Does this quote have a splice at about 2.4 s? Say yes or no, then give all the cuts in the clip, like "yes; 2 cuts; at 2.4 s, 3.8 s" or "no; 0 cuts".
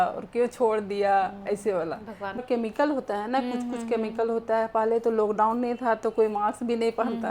yes; 1 cut; at 2.4 s